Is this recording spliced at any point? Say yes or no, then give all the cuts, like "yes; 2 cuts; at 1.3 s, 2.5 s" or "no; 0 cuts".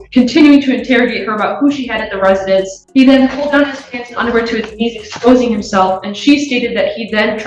yes; 1 cut; at 2.8 s